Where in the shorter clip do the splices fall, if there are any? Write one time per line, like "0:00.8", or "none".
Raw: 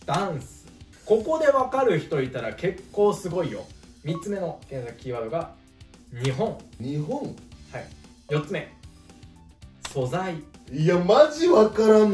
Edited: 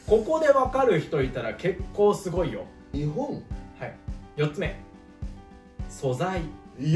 0:02.8